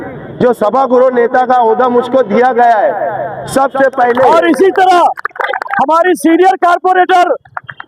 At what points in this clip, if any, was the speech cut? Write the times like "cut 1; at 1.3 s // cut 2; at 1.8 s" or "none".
cut 1; at 4.3 s